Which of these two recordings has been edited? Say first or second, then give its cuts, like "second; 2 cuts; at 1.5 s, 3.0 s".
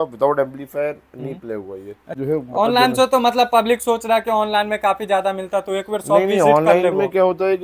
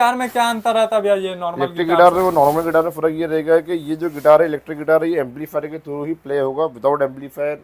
first; 1 cut; at 2.1 s